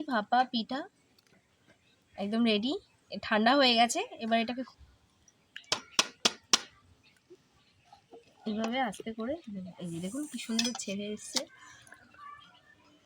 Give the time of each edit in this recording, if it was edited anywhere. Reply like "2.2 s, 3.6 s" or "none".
4.7 s